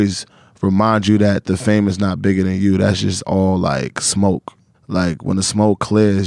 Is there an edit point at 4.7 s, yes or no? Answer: yes